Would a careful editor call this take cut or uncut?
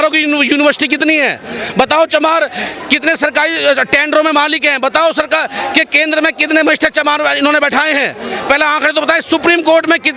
uncut